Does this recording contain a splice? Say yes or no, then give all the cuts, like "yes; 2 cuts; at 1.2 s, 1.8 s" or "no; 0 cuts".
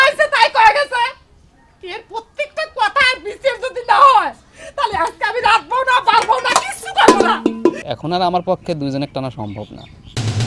yes; 1 cut; at 7.9 s